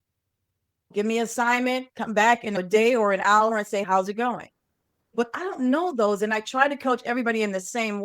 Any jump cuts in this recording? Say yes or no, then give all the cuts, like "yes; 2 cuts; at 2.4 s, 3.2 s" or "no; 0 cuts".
yes; 1 cut; at 2.5 s